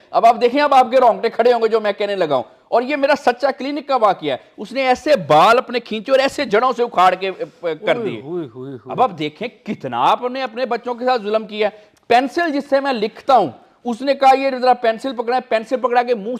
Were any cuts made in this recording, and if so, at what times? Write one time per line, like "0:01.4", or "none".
none